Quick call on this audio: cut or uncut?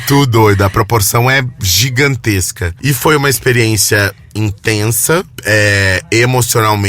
cut